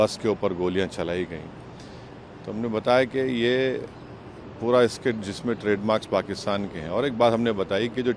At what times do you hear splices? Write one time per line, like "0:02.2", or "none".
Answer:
none